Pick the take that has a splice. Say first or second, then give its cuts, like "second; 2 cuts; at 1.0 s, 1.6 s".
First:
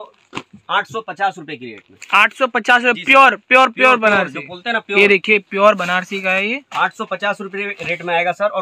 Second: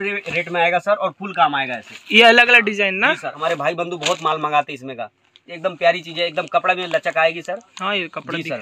second; 1 cut; at 3.4 s